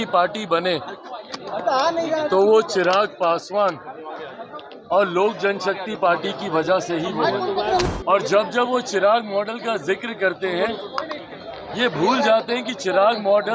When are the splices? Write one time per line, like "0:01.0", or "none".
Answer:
0:07.8